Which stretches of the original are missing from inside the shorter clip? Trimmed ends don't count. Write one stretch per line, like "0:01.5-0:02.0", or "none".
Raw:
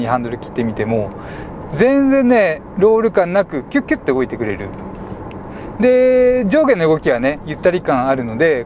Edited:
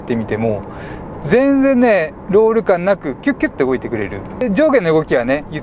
0:04.9-0:06.4